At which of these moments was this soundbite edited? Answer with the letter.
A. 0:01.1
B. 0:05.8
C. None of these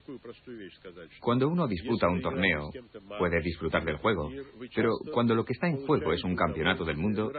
B